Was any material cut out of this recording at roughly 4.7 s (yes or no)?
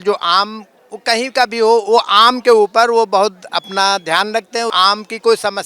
yes